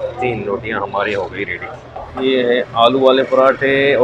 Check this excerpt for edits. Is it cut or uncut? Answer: cut